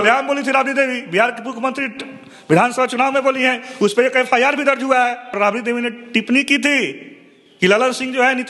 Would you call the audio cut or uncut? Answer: cut